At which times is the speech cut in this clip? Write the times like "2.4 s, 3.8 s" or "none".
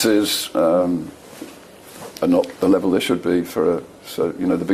none